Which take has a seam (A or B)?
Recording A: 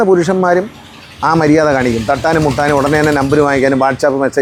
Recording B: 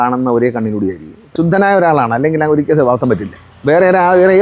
B